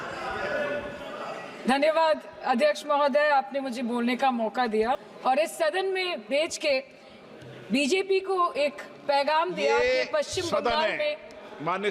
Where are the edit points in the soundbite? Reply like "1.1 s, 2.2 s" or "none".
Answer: 5.0 s